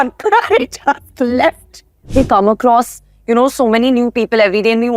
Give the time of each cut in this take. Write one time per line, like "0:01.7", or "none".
0:02.1